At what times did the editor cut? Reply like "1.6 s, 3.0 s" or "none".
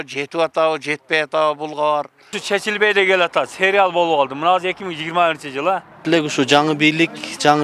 2.3 s, 6.0 s